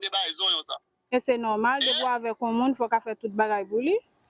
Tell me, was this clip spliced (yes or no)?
no